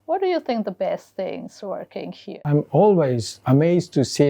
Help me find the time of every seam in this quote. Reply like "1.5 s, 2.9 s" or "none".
2.4 s